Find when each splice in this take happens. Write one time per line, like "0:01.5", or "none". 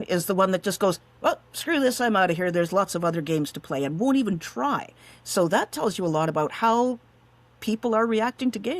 none